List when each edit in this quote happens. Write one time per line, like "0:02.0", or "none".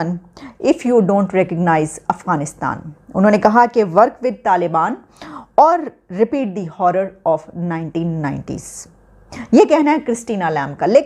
none